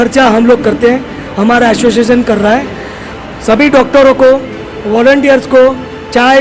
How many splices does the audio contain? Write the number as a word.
zero